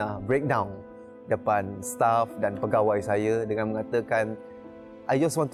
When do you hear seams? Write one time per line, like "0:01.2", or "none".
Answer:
none